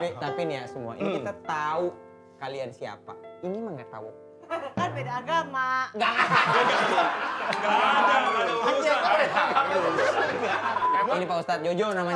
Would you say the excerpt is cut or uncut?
cut